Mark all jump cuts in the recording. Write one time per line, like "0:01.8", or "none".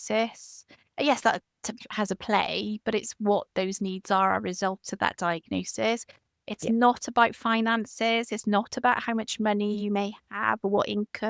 none